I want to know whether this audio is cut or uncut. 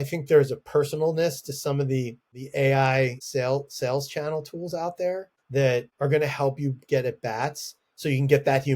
cut